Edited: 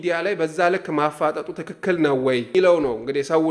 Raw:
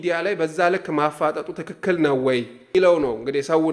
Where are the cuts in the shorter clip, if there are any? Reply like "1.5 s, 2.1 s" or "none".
2.5 s